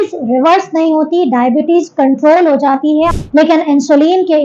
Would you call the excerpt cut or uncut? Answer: cut